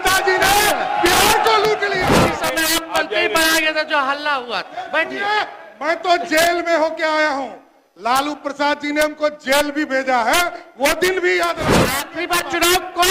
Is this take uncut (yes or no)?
no